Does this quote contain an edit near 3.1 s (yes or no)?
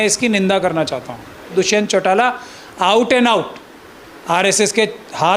no